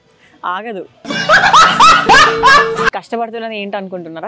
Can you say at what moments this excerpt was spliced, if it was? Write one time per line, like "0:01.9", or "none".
0:03.0